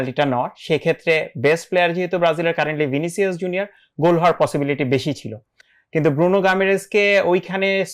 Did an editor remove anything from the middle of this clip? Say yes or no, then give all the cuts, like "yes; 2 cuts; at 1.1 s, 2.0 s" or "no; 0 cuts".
no; 0 cuts